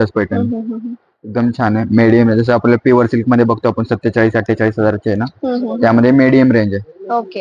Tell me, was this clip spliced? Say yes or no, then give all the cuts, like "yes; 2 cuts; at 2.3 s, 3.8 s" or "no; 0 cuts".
no; 0 cuts